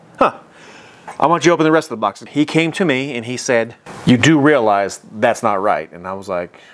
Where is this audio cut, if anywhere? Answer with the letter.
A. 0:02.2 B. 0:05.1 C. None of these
A